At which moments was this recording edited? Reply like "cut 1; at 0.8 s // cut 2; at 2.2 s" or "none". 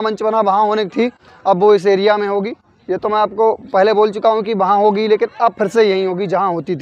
none